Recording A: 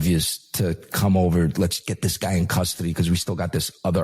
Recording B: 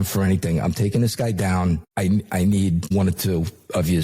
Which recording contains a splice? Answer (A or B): B